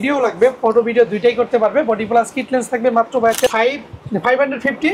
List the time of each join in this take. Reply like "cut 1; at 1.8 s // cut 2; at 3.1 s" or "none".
cut 1; at 3.5 s